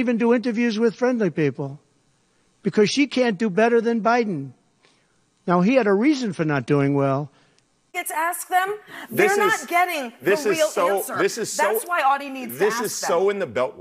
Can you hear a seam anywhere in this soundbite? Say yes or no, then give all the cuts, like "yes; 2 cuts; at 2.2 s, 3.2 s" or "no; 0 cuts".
yes; 1 cut; at 8.0 s